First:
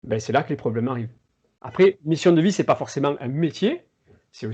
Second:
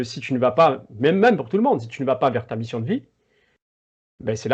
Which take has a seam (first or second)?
first